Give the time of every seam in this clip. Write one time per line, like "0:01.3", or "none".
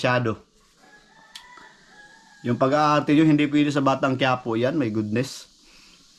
none

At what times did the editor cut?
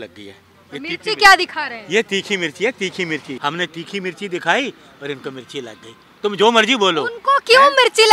0:03.3

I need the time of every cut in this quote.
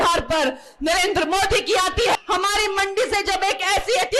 0:02.2

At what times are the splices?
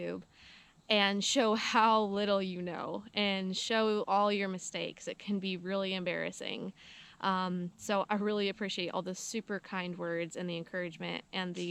none

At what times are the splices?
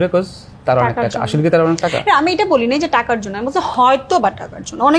none

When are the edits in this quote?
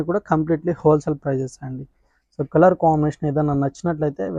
none

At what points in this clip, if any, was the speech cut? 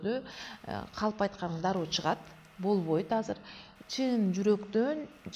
none

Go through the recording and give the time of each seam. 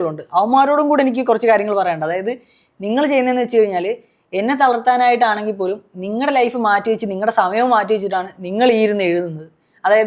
none

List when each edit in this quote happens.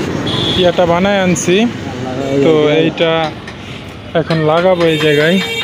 none

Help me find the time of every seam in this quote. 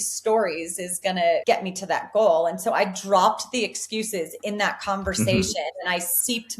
0:01.4

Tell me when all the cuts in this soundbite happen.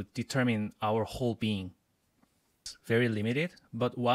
0:02.7

